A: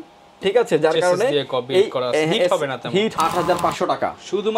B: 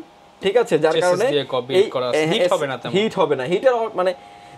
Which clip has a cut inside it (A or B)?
A